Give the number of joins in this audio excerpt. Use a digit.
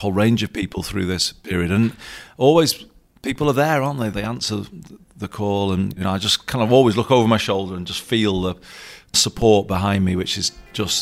2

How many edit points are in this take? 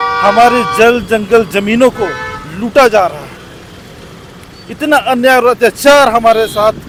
0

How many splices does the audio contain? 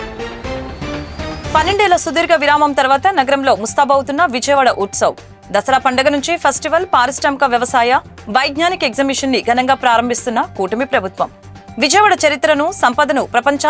1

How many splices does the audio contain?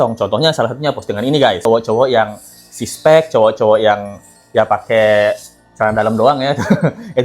1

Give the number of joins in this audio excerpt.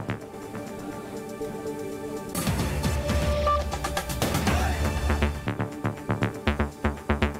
1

